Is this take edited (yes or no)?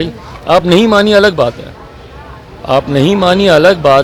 no